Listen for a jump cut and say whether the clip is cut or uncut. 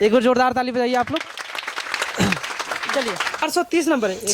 cut